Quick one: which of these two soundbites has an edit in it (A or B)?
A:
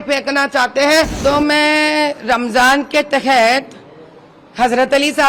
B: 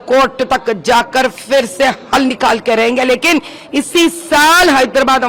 A